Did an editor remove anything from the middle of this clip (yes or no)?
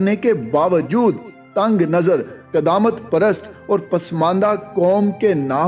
no